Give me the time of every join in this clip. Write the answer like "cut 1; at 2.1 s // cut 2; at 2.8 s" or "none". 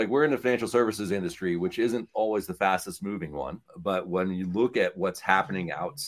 none